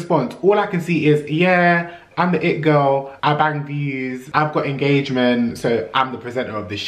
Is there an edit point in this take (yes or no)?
yes